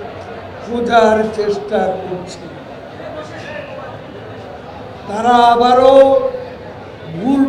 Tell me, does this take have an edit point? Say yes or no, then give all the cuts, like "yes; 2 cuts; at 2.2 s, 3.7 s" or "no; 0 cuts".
yes; 1 cut; at 4.9 s